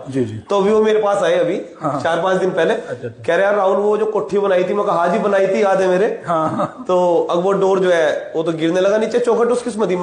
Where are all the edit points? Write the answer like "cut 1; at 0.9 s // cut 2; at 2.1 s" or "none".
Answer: none